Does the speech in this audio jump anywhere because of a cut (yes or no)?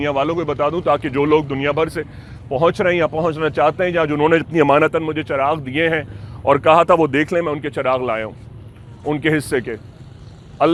no